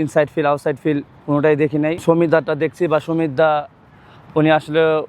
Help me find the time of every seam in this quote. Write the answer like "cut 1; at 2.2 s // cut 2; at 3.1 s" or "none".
cut 1; at 2.0 s